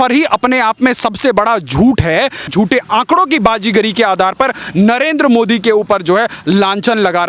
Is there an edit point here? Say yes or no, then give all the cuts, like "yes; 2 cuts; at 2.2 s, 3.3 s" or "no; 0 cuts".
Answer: yes; 1 cut; at 2.5 s